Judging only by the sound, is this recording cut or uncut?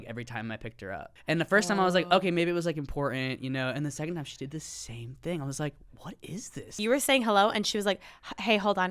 cut